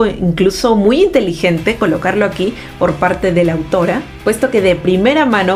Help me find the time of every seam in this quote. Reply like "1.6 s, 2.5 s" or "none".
none

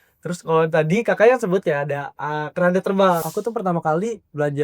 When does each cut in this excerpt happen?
3.3 s

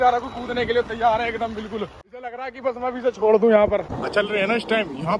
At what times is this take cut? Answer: 2.5 s, 4.0 s

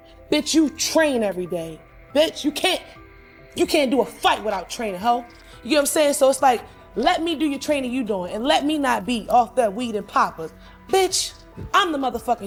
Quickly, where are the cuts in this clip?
none

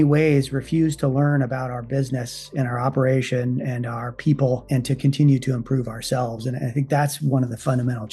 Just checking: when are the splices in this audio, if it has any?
none

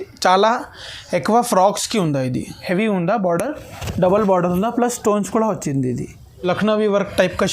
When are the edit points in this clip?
2.5 s, 6.3 s

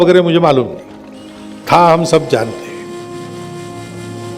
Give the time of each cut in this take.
3.1 s

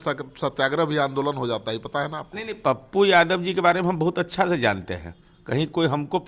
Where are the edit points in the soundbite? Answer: none

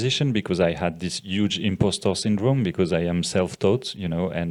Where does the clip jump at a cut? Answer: none

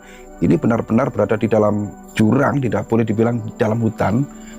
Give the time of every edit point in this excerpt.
2.0 s

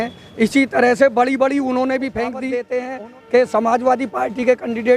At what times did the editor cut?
2.5 s

